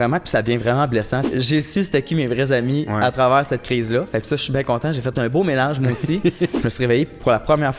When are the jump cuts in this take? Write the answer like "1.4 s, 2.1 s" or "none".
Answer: 1.2 s, 6.5 s